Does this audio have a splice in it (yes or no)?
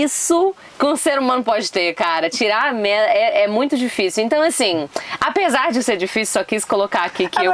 no